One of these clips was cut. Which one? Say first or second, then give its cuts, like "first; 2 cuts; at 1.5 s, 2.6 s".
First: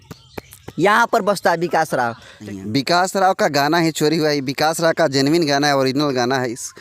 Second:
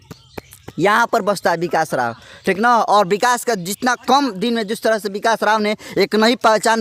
first; 1 cut; at 2.3 s